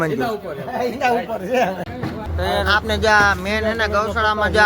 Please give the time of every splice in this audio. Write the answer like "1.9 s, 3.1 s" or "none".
1.8 s